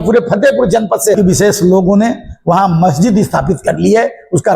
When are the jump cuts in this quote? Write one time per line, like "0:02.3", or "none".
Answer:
0:01.2